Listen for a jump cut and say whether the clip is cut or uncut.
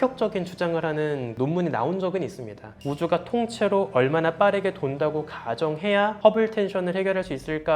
cut